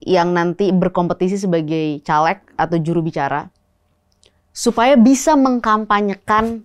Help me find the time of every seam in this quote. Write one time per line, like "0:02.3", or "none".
none